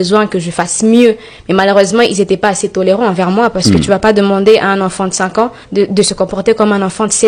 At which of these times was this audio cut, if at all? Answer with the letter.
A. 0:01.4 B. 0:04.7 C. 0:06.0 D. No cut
D